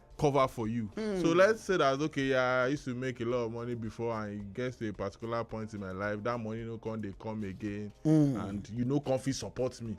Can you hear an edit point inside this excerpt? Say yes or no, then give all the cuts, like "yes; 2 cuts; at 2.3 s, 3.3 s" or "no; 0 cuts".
yes; 1 cut; at 0.9 s